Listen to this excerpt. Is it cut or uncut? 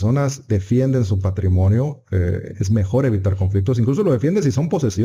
uncut